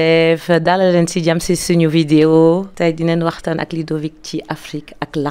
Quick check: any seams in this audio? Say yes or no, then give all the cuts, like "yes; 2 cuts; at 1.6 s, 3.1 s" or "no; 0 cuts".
yes; 1 cut; at 2.7 s